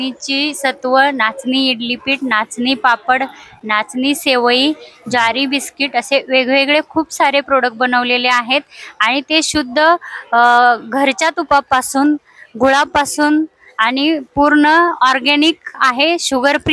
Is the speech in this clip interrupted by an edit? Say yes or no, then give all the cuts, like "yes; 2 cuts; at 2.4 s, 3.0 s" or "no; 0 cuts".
no; 0 cuts